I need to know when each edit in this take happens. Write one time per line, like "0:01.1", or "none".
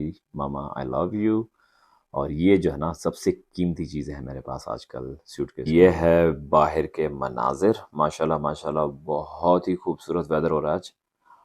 0:05.6